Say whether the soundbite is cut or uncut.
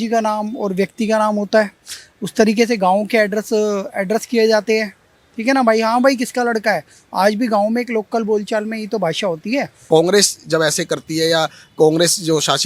cut